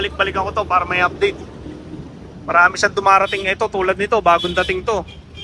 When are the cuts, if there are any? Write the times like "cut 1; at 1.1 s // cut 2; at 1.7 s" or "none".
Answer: none